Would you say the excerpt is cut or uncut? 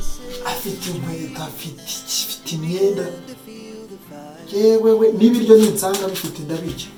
uncut